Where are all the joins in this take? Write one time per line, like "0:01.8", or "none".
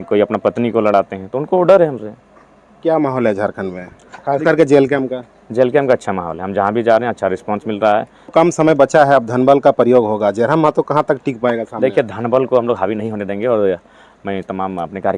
0:08.3